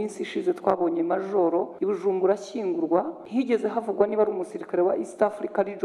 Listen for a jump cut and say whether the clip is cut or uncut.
cut